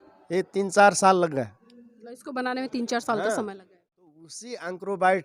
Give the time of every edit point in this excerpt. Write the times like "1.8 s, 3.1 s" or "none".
4.2 s